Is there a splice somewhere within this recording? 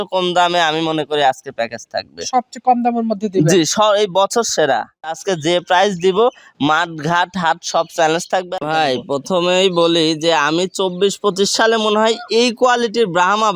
yes; 2 cuts; at 5.2 s, 8.5 s

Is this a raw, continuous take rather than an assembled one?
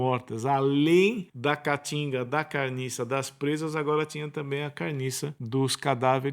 no; 2 cuts; at 1.3 s, 5.4 s

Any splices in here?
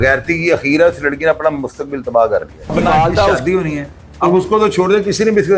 yes; 1 cut; at 2.7 s

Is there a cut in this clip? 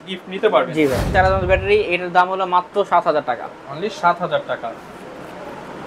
yes; 1 cut; at 1.1 s

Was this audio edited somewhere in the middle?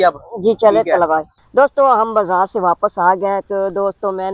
yes; 1 cut; at 1.3 s

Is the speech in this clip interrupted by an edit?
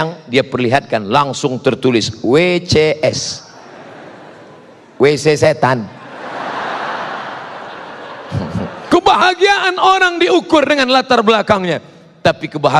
yes; 1 cut; at 8.8 s

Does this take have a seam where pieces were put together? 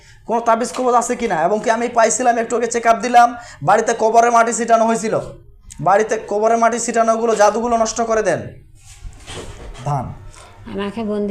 yes; 1 cut; at 9.8 s

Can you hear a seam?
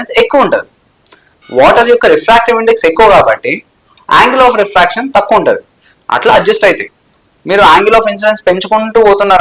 no; 0 cuts

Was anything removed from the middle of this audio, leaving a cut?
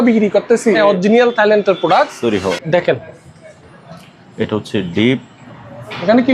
yes; 2 cuts; at 0.8 s, 2.6 s

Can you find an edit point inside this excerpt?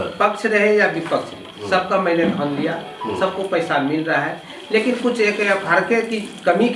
no; 0 cuts

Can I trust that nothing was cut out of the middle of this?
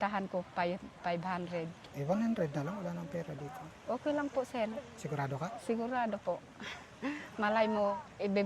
no; 1 cut; at 1.8 s

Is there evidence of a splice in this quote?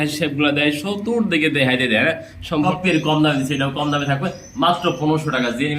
yes; 1 cut; at 2.7 s

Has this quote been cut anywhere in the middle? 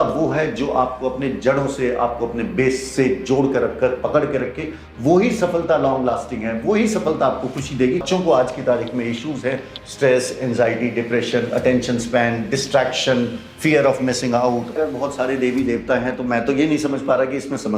yes; 2 cuts; at 8.0 s, 14.7 s

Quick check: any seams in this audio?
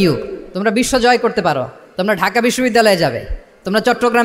no; 0 cuts

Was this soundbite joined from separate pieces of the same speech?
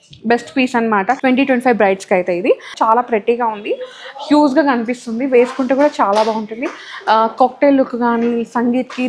yes; 1 cut; at 2.8 s

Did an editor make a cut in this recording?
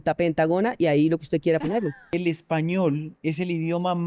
yes; 2 cuts; at 2.0 s, 3.1 s

